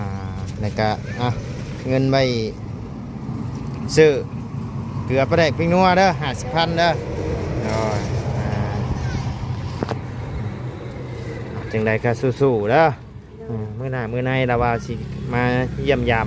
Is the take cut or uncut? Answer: uncut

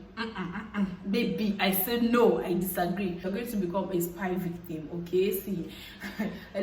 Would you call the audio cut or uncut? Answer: cut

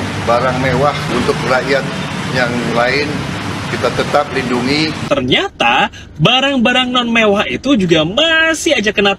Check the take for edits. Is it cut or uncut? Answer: cut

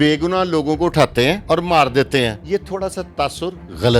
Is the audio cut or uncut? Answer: cut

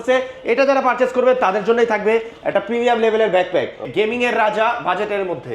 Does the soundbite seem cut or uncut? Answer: cut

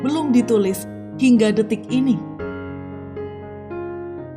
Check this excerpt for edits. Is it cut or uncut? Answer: cut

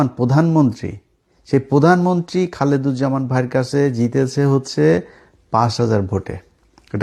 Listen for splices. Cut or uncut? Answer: uncut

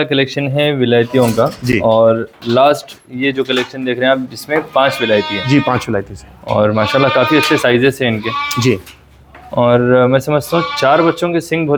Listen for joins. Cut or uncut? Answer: uncut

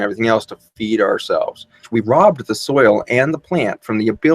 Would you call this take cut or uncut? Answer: cut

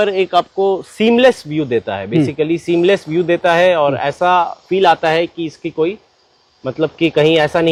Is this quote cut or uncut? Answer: uncut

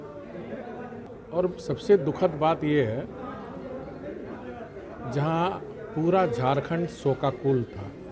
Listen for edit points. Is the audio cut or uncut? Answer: cut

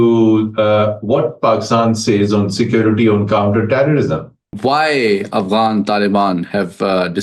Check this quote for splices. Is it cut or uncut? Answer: cut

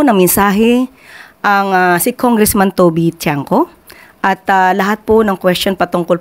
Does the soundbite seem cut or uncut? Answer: uncut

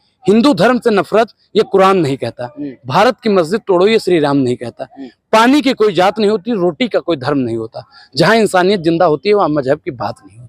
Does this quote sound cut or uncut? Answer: uncut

